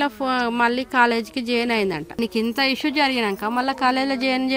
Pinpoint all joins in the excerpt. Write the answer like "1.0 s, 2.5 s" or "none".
2.2 s